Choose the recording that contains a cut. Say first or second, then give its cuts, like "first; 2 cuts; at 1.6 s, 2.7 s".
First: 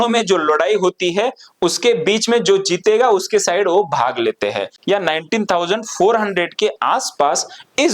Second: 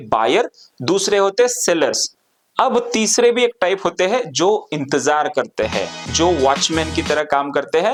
first; 1 cut; at 4.7 s